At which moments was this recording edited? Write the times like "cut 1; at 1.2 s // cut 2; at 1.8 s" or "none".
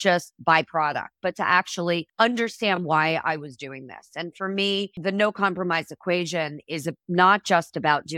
cut 1; at 2.1 s // cut 2; at 5.0 s